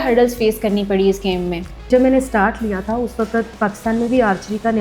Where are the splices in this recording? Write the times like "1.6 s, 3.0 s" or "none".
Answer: 1.9 s